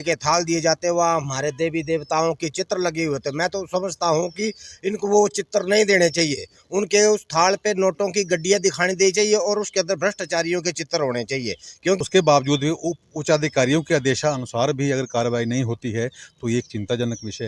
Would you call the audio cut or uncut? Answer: cut